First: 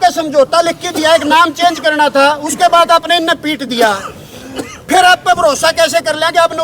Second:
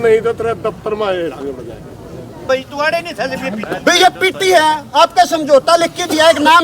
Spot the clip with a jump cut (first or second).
second